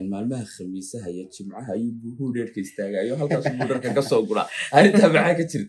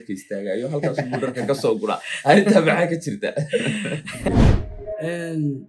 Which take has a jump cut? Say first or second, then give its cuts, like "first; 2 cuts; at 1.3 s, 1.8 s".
second; 1 cut; at 4.3 s